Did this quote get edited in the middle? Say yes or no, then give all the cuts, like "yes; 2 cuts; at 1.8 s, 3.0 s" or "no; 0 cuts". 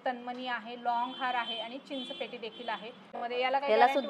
yes; 1 cut; at 3.2 s